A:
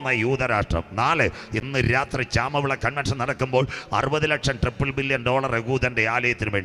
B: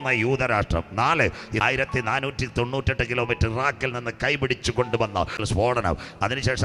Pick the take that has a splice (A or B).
B